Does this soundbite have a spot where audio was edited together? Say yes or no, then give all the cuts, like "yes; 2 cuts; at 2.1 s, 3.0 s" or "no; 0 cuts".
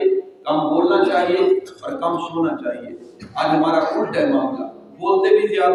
no; 0 cuts